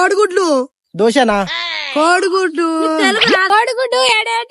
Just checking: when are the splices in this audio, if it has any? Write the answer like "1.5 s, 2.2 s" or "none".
3.5 s